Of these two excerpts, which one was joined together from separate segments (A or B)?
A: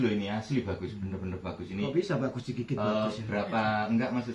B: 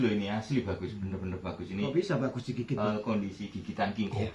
B